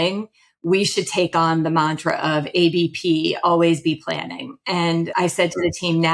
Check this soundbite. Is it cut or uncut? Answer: cut